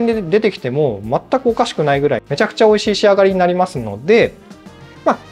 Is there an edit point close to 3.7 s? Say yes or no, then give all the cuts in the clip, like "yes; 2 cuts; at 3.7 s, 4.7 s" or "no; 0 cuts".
no; 0 cuts